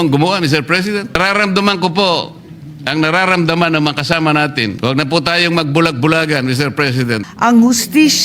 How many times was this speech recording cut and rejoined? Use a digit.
3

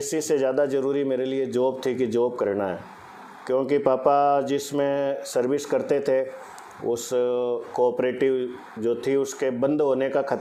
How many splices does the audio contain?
0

